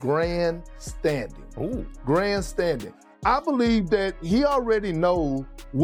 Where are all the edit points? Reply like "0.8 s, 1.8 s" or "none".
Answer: none